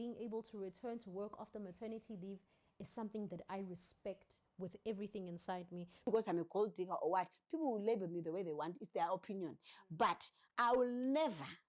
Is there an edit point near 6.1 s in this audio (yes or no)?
yes